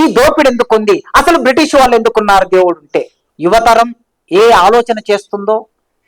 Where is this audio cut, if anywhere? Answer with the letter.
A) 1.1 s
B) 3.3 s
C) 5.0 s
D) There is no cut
B